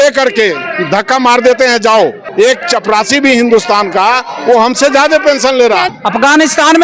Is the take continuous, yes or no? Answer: no